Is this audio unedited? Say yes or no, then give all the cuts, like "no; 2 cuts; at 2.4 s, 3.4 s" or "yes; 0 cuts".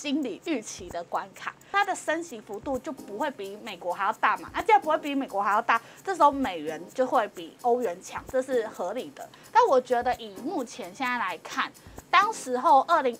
no; 1 cut; at 1.7 s